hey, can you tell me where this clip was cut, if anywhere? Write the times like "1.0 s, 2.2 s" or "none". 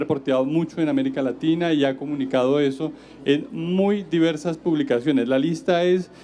2.1 s